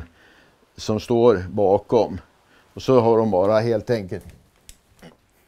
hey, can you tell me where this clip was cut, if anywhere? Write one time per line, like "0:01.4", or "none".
none